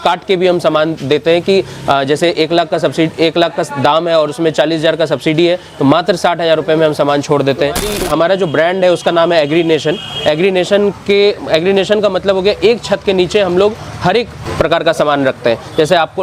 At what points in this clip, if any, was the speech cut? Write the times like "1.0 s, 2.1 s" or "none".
7.9 s, 14.4 s

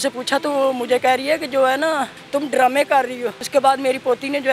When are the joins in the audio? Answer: 2.2 s, 3.4 s

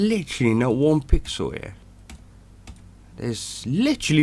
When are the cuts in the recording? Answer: 1.9 s

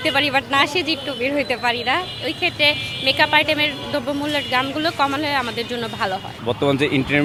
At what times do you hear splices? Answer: none

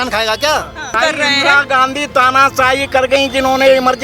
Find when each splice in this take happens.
0.9 s

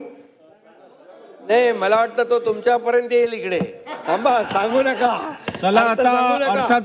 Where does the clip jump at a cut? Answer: 2.6 s

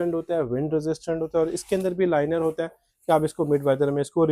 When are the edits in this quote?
none

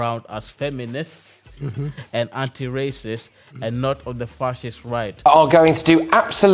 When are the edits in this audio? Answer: 5.1 s

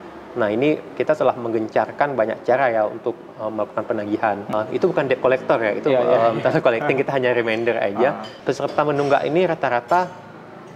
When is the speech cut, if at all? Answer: 4.5 s, 8.3 s

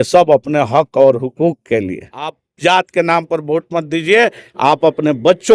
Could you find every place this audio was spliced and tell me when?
2.4 s

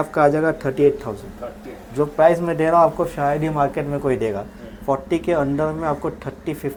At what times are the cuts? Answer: none

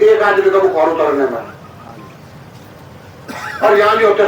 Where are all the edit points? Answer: none

